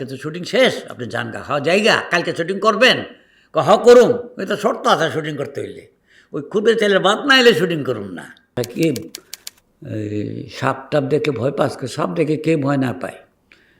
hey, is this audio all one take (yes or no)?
no